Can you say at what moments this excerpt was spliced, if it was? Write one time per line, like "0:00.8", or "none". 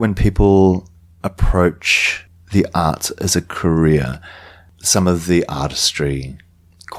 none